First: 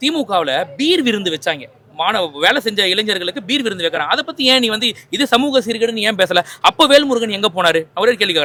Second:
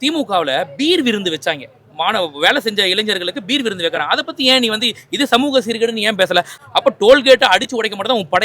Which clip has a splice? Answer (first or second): second